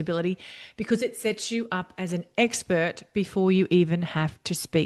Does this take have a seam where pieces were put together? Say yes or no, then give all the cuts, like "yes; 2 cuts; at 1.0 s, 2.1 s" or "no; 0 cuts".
no; 0 cuts